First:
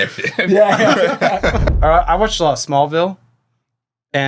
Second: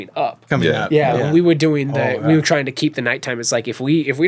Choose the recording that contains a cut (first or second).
first